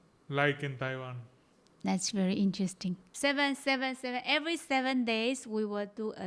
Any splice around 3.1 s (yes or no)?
yes